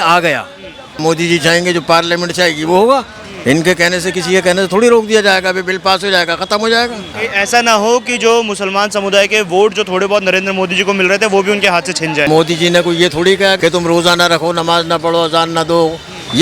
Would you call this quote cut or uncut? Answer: cut